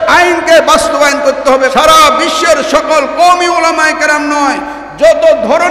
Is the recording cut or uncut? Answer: cut